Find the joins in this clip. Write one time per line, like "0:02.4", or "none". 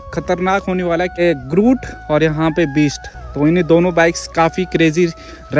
0:01.2